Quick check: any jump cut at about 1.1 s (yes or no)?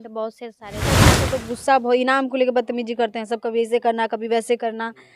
yes